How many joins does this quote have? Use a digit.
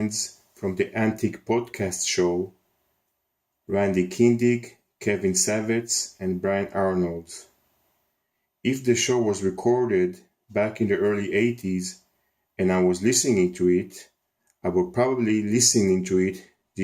1